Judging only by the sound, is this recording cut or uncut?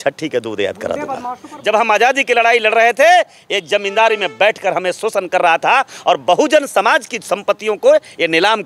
cut